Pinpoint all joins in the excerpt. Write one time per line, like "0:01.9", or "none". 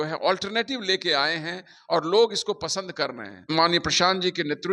0:03.4